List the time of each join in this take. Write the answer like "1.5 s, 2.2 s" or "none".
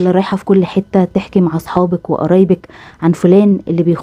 none